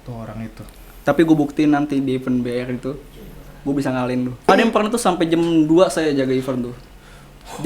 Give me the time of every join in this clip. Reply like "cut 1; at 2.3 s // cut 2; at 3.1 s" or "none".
cut 1; at 4.5 s